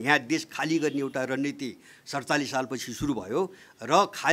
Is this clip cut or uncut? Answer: uncut